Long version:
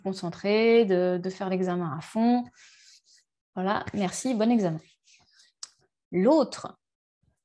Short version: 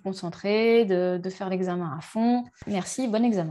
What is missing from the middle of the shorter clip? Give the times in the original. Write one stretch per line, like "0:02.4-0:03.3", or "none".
0:02.6-0:03.9